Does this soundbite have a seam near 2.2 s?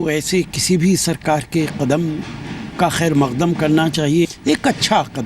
no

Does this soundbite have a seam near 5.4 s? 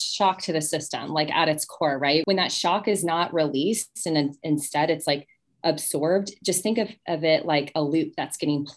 no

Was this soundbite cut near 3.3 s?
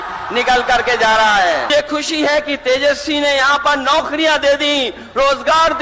no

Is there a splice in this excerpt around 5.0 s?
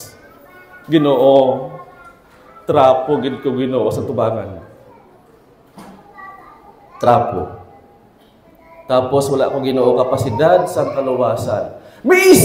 no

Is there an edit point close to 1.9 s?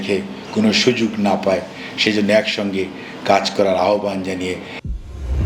no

